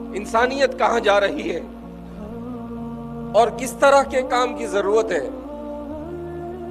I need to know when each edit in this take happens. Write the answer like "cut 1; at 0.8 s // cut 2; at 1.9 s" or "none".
cut 1; at 1.6 s // cut 2; at 3.0 s // cut 3; at 5.3 s

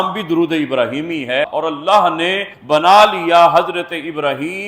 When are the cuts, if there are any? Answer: cut 1; at 1.5 s

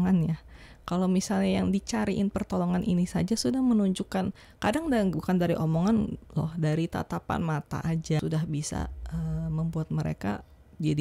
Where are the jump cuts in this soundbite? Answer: cut 1; at 8.2 s

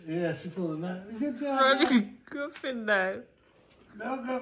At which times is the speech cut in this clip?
none

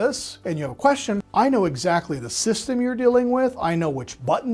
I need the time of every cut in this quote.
cut 1; at 1.3 s

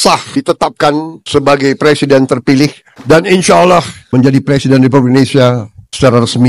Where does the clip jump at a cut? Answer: cut 1; at 2.9 s // cut 2; at 4.0 s

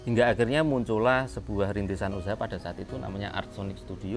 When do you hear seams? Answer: none

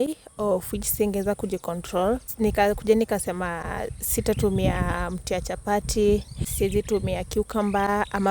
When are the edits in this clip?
cut 1; at 2.3 s // cut 2; at 6.4 s

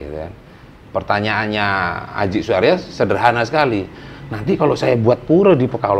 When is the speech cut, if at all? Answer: none

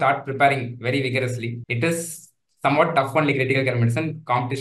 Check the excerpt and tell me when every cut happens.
cut 1; at 1.6 s

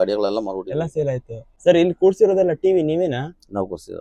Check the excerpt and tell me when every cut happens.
cut 1; at 1.5 s

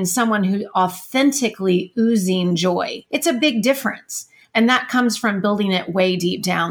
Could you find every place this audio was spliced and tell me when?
cut 1; at 3.0 s

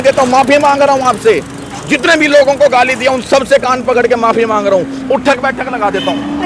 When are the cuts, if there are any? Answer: none

